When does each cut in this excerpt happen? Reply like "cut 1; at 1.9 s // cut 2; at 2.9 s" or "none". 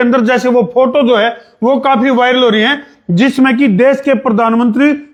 none